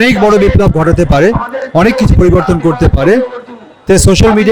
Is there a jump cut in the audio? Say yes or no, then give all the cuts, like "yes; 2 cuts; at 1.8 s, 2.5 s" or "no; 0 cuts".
no; 0 cuts